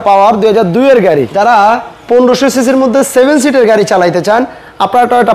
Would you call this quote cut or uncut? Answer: cut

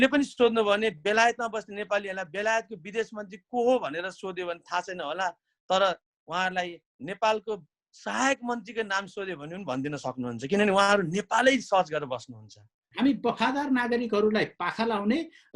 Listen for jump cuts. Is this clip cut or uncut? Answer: cut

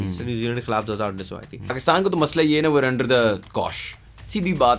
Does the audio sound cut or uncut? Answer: cut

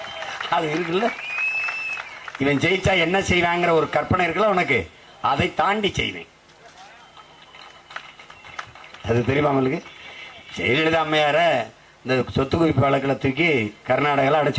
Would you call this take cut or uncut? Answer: uncut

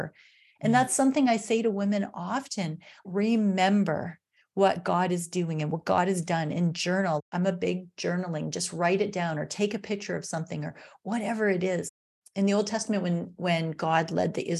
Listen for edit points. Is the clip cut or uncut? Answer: uncut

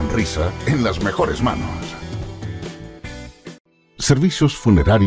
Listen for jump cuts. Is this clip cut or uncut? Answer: cut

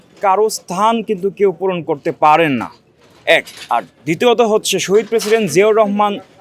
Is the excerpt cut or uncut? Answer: uncut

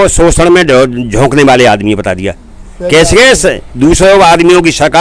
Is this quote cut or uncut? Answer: uncut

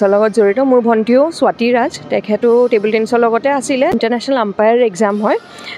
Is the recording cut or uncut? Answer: cut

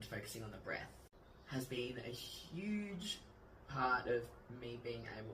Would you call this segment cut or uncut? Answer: cut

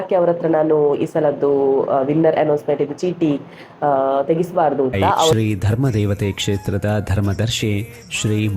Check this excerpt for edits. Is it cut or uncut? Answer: cut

